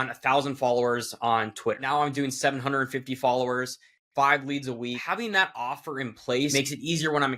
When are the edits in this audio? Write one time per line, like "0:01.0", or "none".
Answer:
0:01.8
0:05.0
0:06.5